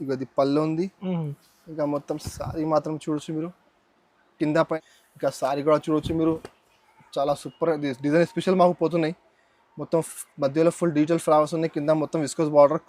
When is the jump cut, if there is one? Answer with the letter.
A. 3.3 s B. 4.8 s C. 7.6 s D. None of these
B